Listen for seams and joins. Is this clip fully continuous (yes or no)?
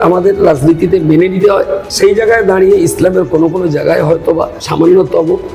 no